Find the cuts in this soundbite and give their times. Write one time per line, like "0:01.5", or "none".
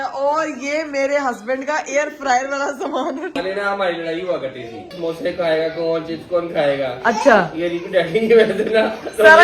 0:03.4
0:04.9